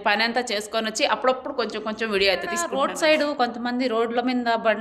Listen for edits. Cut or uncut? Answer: cut